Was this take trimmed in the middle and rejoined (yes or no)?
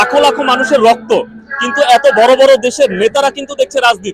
no